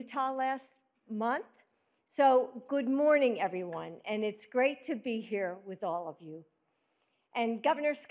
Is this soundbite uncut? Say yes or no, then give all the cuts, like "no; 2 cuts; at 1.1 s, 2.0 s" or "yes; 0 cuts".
no; 2 cuts; at 1.0 s, 5.9 s